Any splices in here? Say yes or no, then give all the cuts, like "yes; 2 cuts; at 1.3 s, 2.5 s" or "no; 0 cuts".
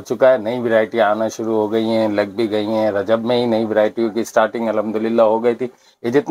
no; 0 cuts